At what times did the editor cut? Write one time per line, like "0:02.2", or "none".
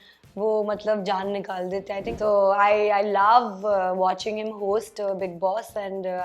0:02.1